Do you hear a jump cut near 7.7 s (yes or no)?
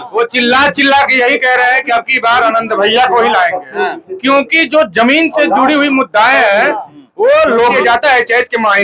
yes